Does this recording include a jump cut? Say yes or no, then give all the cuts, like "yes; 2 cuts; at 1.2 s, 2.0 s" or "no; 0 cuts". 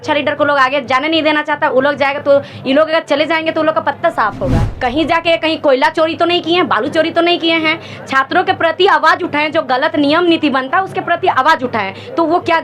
yes; 1 cut; at 4.6 s